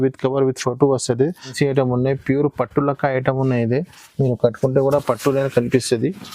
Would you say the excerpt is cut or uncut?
cut